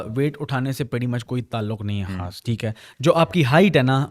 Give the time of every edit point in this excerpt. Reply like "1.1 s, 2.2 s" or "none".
none